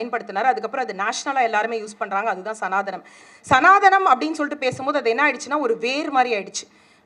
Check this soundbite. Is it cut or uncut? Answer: cut